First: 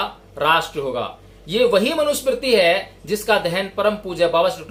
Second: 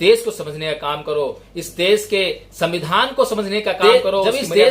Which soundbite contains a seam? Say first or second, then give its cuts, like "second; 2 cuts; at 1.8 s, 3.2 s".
second; 1 cut; at 3.8 s